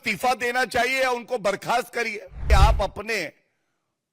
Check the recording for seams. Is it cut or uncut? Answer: cut